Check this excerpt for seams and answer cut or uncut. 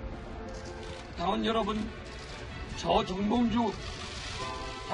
uncut